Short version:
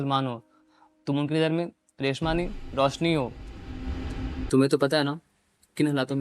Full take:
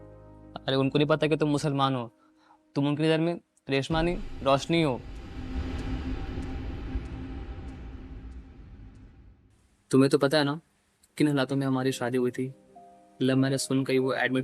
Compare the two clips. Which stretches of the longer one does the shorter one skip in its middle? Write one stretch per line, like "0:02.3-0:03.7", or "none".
0:06.1-0:09.8

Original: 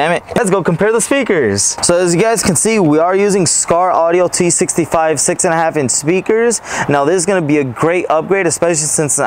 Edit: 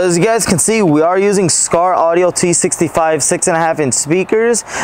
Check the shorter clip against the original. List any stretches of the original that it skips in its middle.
none

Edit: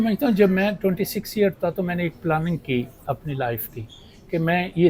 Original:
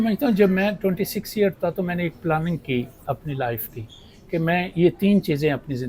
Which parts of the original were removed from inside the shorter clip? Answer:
none

